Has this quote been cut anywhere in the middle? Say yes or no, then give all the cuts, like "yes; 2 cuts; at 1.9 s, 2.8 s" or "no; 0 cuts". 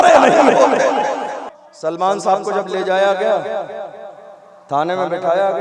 yes; 1 cut; at 1.4 s